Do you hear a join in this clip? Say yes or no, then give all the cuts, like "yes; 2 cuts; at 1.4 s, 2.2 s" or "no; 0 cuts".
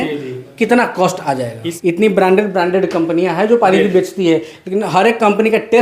yes; 1 cut; at 1.7 s